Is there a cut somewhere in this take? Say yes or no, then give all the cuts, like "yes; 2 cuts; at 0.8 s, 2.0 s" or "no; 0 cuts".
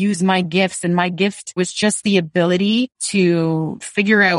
yes; 2 cuts; at 1.6 s, 3.0 s